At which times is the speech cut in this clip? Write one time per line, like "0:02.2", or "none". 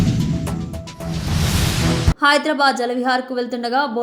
0:02.1